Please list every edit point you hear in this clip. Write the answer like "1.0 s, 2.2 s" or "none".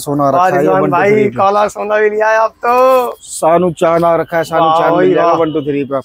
none